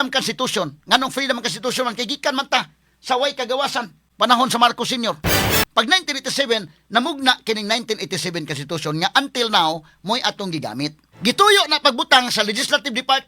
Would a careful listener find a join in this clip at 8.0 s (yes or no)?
no